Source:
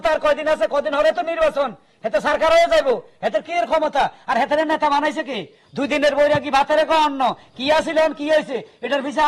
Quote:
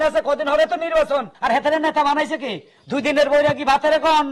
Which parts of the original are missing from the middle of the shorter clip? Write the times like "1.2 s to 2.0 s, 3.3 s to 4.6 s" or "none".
1.8 s to 4.2 s